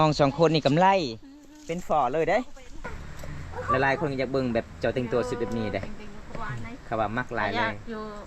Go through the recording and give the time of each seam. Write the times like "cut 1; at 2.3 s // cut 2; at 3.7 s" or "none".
cut 1; at 3.0 s